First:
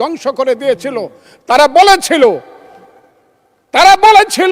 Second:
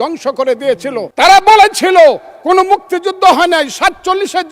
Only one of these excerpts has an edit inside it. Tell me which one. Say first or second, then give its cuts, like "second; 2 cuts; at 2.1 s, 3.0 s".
second; 1 cut; at 1.1 s